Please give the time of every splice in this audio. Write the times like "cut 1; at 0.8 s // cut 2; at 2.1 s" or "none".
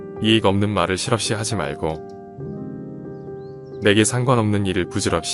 cut 1; at 2.0 s // cut 2; at 3.6 s

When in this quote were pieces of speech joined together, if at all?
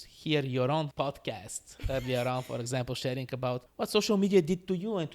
cut 1; at 0.9 s // cut 2; at 3.7 s

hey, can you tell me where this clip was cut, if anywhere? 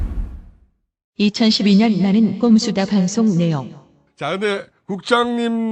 none

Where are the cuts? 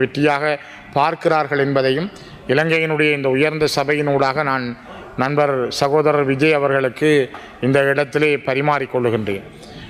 none

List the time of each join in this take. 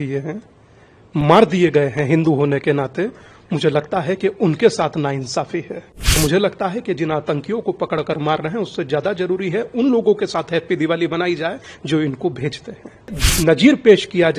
cut 1; at 6.2 s // cut 2; at 13.2 s

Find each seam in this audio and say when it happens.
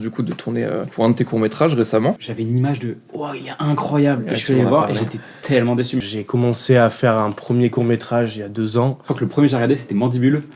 cut 1; at 0.9 s // cut 2; at 2.2 s // cut 3; at 6.1 s // cut 4; at 9.0 s

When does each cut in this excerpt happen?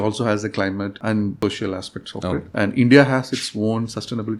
cut 1; at 1.4 s // cut 2; at 2.5 s

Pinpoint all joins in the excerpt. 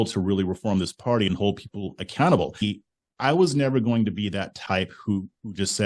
cut 1; at 2.6 s

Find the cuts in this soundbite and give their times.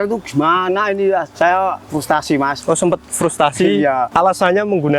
cut 1; at 1.3 s // cut 2; at 2.6 s // cut 3; at 4.1 s

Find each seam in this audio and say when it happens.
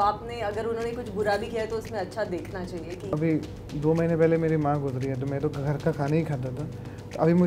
cut 1; at 3.1 s

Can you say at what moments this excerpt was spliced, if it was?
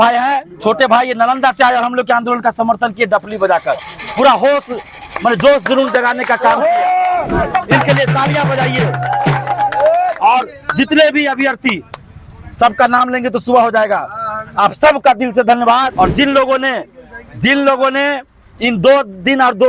cut 1; at 15.9 s

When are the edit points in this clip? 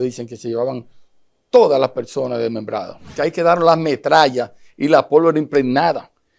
cut 1; at 3.1 s

